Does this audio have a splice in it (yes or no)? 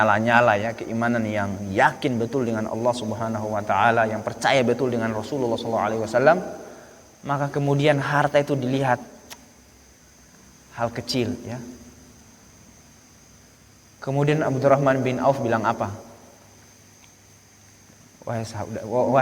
no